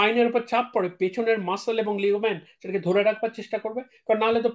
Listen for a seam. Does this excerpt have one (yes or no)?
no